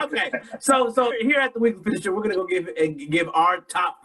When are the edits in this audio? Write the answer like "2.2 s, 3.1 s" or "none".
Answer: 1.1 s